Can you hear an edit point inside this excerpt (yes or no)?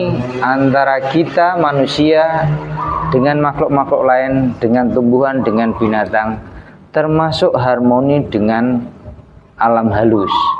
no